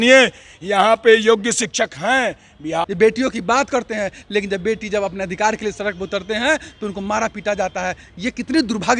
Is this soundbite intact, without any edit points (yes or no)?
no